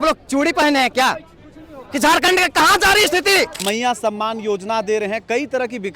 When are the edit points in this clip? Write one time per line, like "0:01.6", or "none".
0:03.6